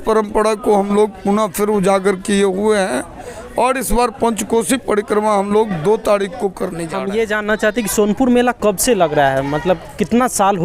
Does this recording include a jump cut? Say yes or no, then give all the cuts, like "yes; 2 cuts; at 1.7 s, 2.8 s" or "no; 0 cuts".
yes; 1 cut; at 6.8 s